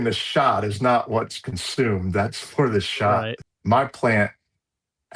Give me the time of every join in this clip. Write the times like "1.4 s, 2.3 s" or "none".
3.4 s